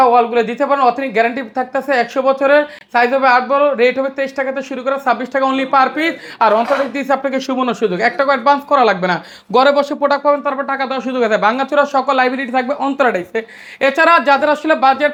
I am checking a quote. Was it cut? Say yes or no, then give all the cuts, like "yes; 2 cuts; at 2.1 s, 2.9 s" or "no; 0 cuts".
no; 0 cuts